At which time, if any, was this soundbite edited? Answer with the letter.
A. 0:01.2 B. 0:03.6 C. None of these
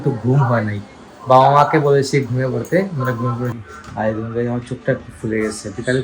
B